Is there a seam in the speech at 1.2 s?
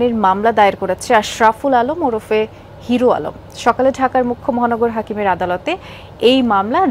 no; 0 cuts

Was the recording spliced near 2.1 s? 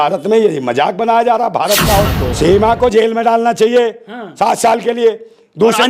yes; 1 cut; at 2.1 s

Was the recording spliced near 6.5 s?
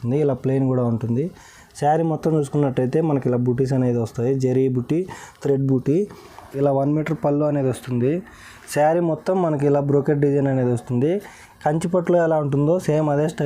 yes; 1 cut; at 6.5 s

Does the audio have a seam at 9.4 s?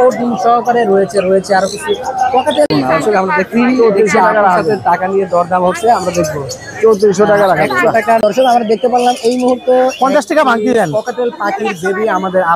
no; 2 cuts; at 2.7 s, 8.2 s

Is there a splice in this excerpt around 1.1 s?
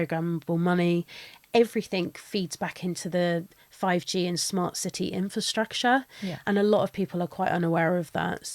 no; 0 cuts

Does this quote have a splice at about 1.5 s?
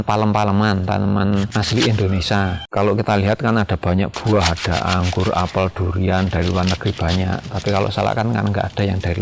yes; 1 cut; at 1.5 s

